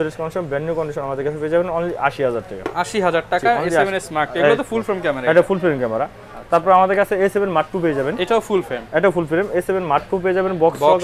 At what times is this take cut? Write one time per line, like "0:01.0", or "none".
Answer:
none